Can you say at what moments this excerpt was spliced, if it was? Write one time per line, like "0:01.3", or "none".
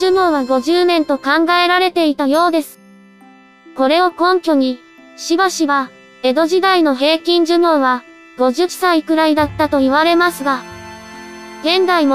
0:07.6